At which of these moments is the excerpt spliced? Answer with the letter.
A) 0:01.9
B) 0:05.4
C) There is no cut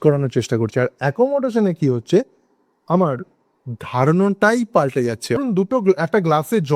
B